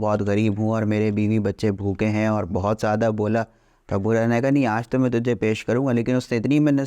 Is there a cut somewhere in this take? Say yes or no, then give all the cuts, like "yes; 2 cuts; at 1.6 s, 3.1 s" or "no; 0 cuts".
no; 0 cuts